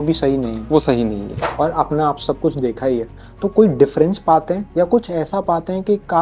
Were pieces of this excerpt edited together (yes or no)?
yes